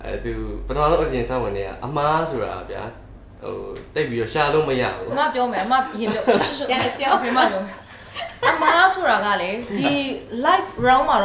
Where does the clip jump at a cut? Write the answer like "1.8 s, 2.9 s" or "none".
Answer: none